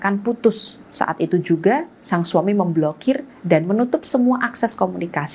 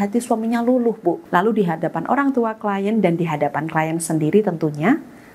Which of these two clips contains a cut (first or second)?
second